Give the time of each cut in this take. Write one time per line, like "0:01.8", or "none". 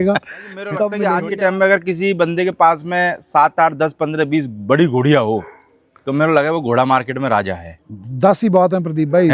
0:01.0